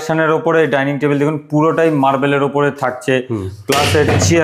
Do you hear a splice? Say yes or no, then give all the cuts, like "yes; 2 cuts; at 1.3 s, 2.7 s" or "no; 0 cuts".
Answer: no; 0 cuts